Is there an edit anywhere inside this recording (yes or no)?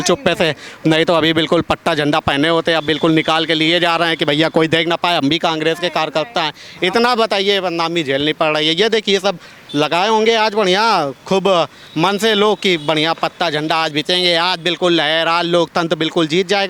no